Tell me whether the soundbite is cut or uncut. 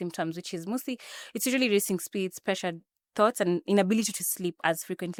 uncut